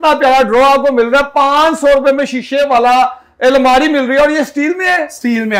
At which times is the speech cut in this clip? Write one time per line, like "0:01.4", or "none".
none